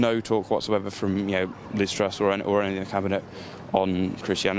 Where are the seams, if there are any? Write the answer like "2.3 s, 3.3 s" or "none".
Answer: none